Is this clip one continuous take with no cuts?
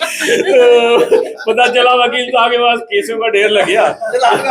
yes; 0 cuts

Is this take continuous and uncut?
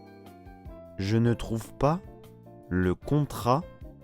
no; 1 cut; at 1.0 s

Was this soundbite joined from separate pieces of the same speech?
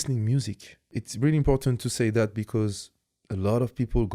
yes; 1 cut; at 1.0 s

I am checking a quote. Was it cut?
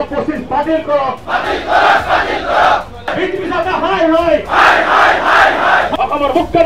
yes; 2 cuts; at 3.1 s, 5.9 s

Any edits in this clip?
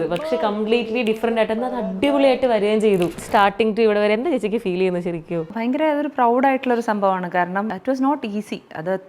yes; 3 cuts; at 3.2 s, 5.5 s, 7.7 s

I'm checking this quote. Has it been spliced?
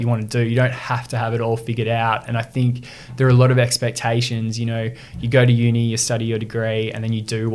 no; 0 cuts

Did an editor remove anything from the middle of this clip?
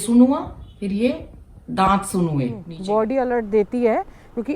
yes; 1 cut; at 2.7 s

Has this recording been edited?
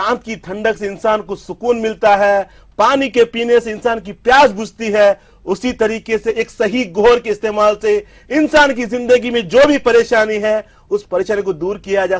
no; 0 cuts

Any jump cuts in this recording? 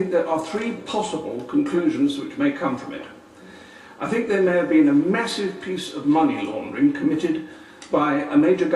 yes; 1 cut; at 1.5 s

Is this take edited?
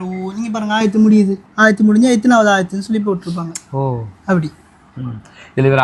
no; 0 cuts

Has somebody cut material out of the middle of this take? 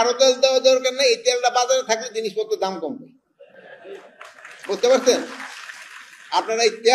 no; 0 cuts

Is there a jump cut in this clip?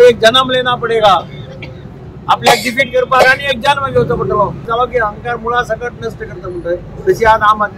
yes; 1 cut; at 4.7 s

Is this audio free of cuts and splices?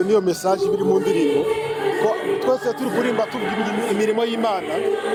yes; 0 cuts

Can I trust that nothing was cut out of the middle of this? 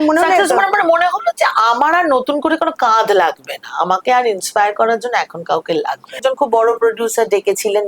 no; 1 cut; at 6.2 s

